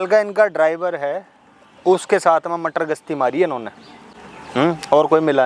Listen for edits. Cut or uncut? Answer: uncut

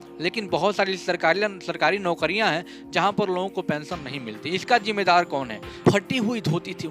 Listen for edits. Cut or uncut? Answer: cut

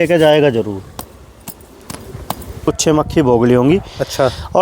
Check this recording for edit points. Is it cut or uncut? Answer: cut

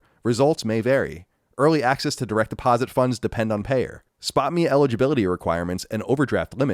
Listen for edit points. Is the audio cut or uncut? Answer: uncut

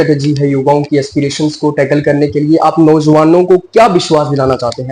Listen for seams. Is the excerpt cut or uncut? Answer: uncut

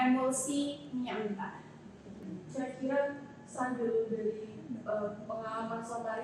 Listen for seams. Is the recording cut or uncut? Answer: cut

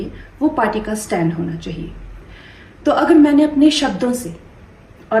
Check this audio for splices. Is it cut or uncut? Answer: uncut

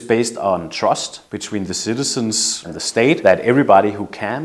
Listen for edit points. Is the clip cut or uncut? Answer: cut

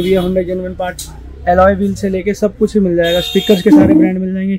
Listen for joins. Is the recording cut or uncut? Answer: uncut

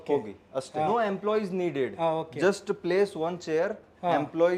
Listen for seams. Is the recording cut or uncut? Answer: uncut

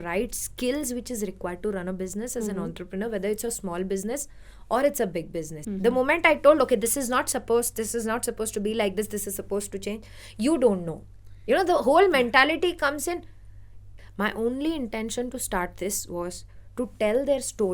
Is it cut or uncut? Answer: cut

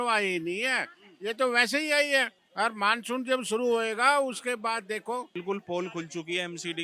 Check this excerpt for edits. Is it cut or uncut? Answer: cut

